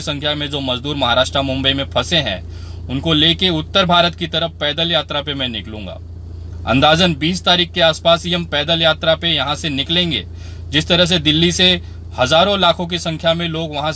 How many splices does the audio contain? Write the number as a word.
zero